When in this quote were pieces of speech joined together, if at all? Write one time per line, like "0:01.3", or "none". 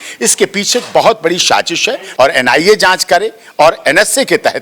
0:02.0

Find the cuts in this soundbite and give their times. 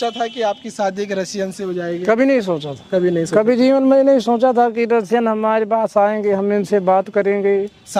none

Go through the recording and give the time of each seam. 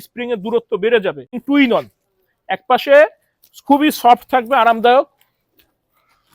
0:01.3

